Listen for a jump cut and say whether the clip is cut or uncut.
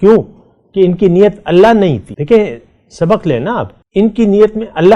cut